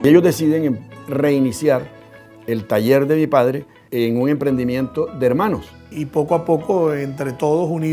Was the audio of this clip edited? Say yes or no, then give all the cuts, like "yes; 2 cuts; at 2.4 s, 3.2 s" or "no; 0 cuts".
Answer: yes; 3 cuts; at 1.0 s, 3.8 s, 5.9 s